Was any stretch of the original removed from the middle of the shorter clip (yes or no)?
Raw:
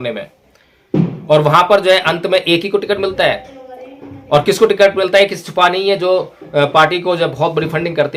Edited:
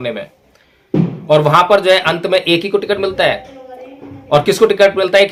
no